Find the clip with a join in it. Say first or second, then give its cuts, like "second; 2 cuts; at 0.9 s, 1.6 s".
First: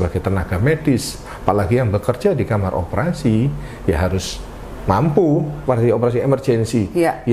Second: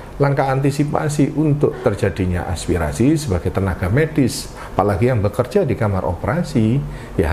first; 1 cut; at 5.6 s